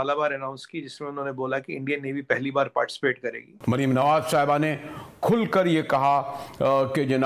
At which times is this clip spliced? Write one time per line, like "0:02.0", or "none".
0:03.6